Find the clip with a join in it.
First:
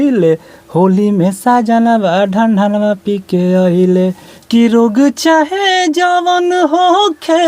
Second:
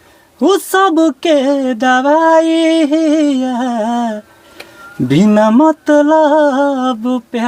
first; 1 cut; at 4.4 s

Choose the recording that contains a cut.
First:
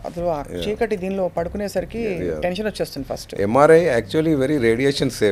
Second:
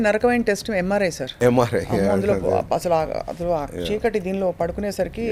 second; 1 cut; at 1.2 s

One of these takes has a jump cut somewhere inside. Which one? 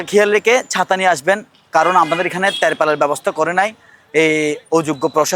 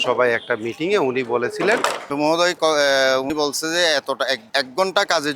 second; 3 cuts; at 2.1 s, 3.3 s, 4.4 s

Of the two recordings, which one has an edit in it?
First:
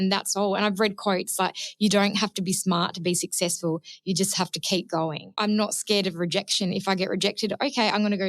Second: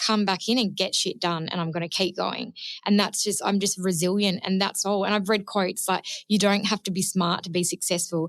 first; 1 cut; at 5.3 s

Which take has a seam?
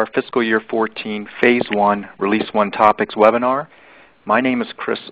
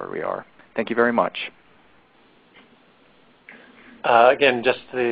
second; 1 cut; at 1.4 s

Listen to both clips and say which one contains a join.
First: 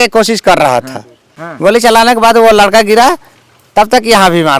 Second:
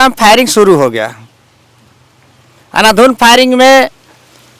first; 1 cut; at 1.4 s

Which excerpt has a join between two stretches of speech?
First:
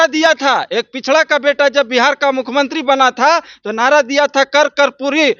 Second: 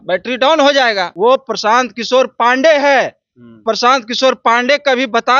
second; 2 cuts; at 1.1 s, 3.5 s

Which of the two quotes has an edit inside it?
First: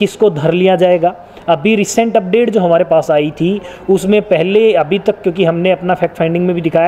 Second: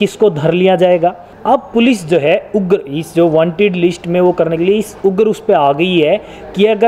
second; 1 cut; at 1.3 s

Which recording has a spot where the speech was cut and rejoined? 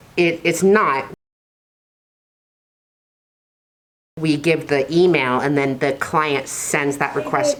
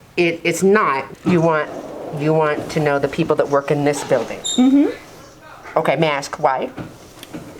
second; 1 cut; at 1.1 s

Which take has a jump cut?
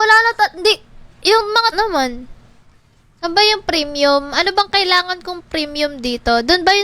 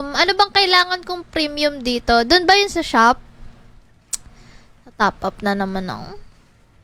first; 1 cut; at 1.8 s

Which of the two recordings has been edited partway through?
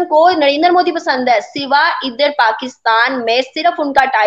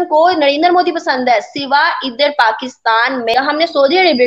second; 1 cut; at 3.3 s

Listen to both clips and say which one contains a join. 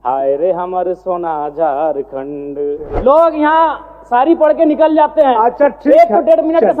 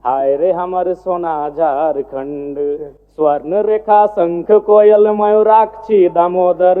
first; 1 cut; at 2.9 s

